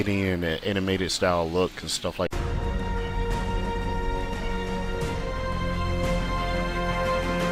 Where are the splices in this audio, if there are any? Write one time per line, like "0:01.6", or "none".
none